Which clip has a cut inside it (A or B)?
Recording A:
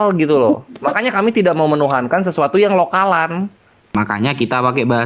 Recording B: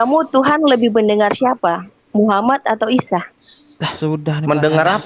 A